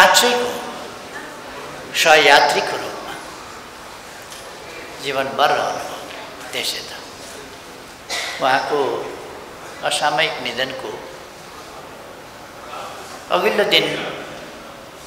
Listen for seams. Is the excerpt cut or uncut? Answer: cut